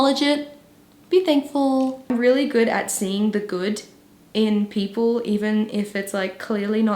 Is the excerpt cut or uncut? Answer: cut